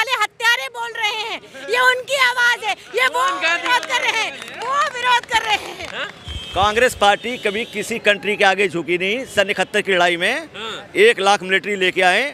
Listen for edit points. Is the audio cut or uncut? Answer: uncut